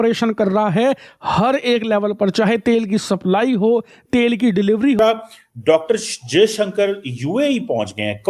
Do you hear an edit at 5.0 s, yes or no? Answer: yes